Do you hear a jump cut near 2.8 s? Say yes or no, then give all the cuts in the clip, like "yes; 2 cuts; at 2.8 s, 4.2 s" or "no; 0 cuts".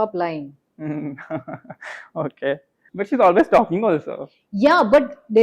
yes; 1 cut; at 2.8 s